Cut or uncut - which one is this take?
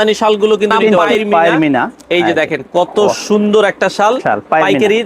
cut